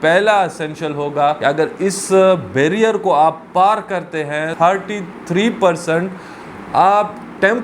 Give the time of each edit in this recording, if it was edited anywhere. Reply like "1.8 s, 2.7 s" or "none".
1.4 s, 4.5 s